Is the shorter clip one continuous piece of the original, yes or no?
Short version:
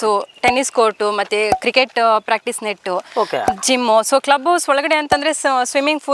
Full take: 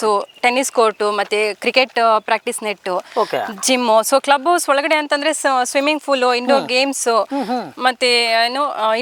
yes